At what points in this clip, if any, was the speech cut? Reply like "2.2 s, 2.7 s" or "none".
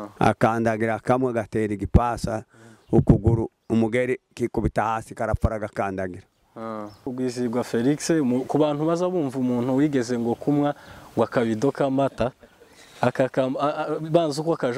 7.1 s